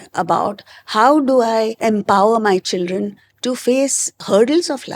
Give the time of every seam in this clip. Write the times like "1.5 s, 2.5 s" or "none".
1.8 s, 4.1 s